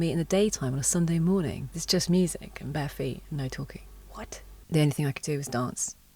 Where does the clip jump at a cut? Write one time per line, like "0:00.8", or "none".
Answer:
0:01.7
0:04.5